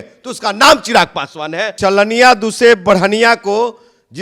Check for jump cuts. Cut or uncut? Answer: cut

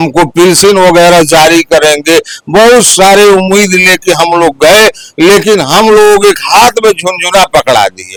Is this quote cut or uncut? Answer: uncut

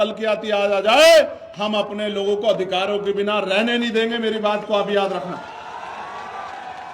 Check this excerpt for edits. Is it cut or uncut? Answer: uncut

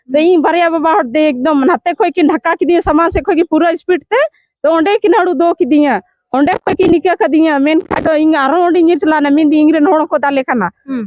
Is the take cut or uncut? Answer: uncut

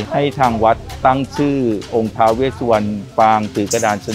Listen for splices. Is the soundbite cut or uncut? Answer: cut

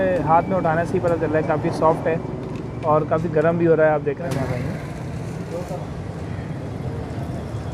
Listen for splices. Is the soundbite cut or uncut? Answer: cut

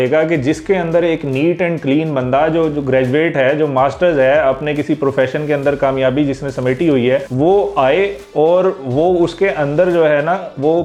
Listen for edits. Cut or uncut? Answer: uncut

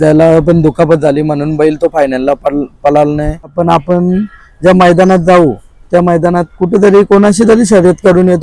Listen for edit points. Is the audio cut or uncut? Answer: cut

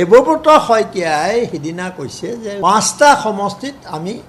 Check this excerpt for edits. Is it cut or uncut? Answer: cut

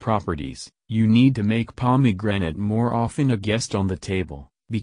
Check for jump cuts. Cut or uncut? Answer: uncut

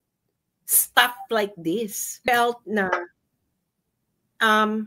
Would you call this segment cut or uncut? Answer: cut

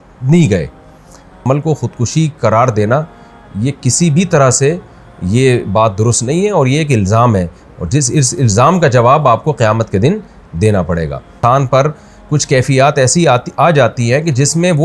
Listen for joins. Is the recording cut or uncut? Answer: cut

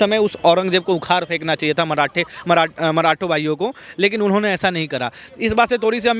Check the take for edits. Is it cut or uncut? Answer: uncut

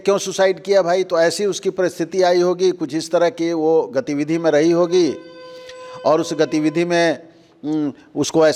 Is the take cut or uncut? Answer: uncut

